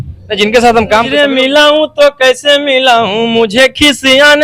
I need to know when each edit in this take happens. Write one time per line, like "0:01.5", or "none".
0:01.1